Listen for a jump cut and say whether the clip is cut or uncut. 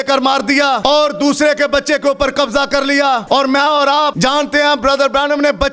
cut